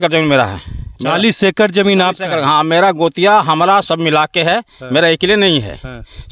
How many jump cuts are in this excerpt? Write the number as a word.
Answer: zero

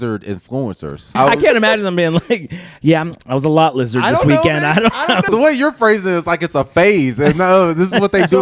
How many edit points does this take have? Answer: two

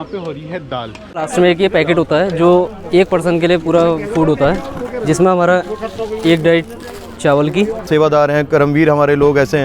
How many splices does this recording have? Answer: two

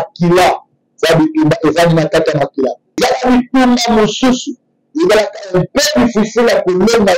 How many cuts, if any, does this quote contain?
one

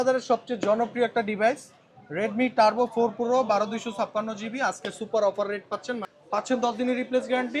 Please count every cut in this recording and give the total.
one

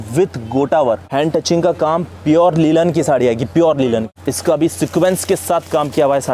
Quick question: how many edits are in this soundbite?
two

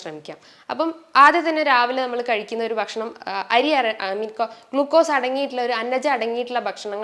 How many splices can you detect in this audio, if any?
zero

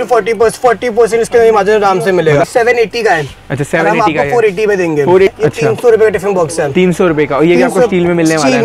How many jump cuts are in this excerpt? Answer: two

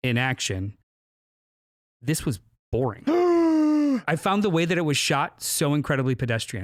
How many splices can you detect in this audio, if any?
one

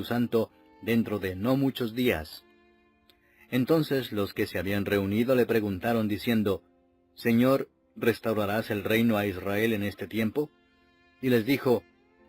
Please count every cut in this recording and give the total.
one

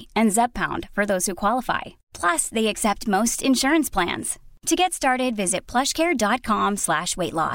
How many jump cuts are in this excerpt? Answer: zero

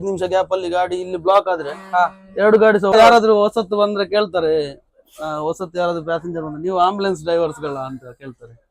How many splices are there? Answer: one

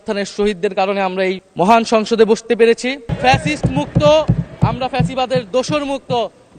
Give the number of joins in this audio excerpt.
one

